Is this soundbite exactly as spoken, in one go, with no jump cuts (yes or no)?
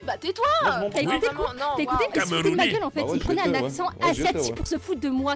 no